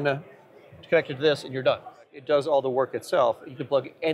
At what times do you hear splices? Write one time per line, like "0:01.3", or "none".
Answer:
0:02.2

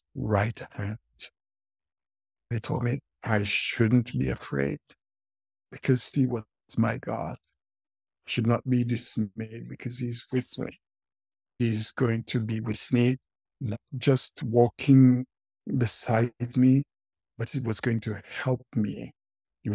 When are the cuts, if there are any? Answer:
0:02.5
0:11.6

